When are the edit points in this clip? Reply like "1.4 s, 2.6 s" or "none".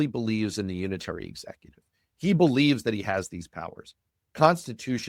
none